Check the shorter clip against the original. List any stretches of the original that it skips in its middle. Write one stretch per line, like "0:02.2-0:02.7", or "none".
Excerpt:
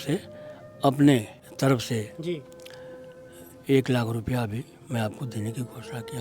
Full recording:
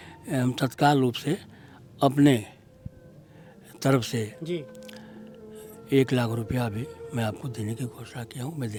0:02.6-0:03.6

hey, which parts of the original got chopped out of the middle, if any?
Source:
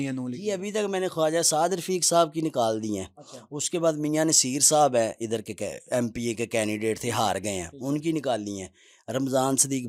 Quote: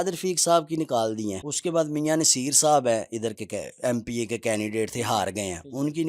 0:03.1-0:03.5

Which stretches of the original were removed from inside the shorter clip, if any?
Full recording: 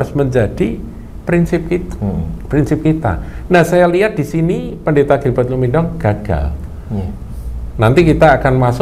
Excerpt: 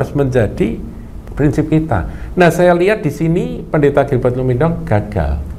0:01.1-0:02.3

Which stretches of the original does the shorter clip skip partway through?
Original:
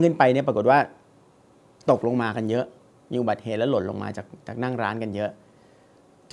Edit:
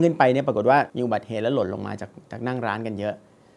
0:00.9-0:03.1

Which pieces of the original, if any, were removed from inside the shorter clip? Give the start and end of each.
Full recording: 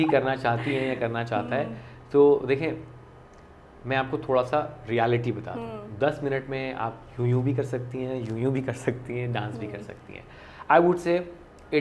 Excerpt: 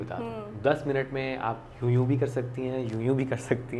none

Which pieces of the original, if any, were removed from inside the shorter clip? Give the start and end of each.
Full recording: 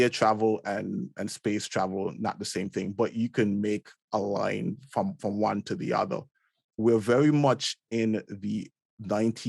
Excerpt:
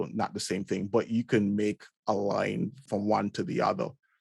0:04.9-0:05.1

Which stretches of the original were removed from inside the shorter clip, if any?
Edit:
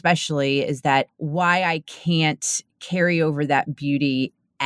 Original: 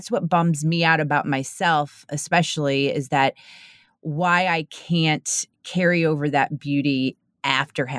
0:03.5-0:04.0

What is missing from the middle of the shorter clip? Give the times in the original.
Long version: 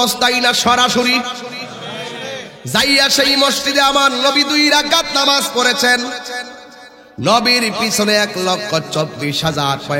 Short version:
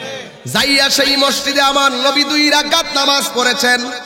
none

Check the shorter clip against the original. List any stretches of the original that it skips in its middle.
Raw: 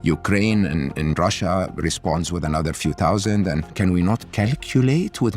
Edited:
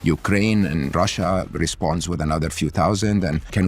0:00.9-0:01.2

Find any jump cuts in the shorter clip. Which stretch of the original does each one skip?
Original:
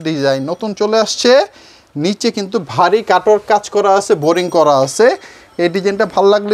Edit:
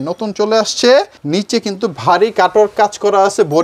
0:01.6-0:01.9

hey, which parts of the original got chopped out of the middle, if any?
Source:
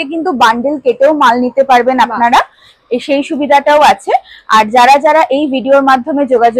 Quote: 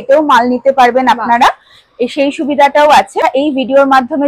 0:04.1-0:05.2

